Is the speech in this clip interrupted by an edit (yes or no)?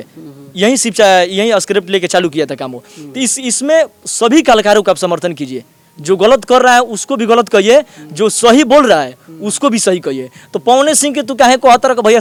no